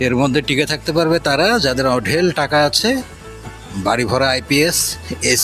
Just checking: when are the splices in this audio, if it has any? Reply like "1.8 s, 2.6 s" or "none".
none

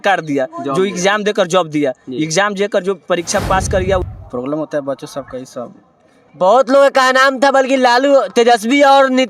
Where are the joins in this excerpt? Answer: 4.1 s

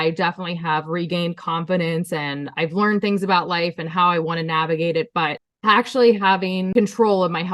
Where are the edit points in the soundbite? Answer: 5.5 s, 6.7 s

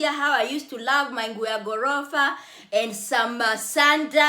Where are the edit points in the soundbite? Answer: none

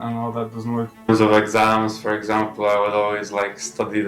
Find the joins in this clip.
0.9 s

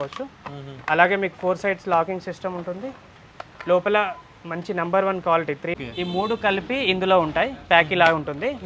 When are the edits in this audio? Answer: 5.8 s

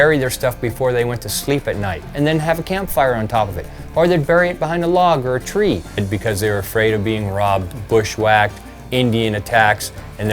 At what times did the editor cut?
2.1 s, 6.0 s

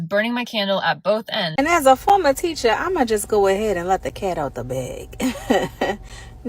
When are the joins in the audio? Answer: 1.5 s

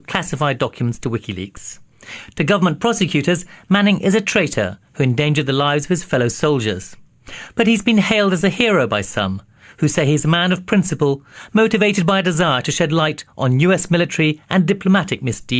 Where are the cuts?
none

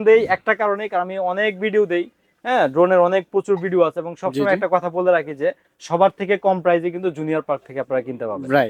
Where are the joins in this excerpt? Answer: none

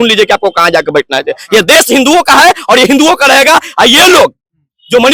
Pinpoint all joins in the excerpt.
none

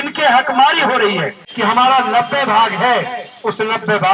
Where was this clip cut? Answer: 1.4 s

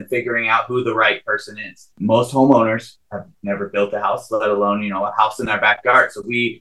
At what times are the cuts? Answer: 2.0 s

